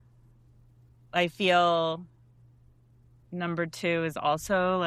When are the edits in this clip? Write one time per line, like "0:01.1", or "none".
none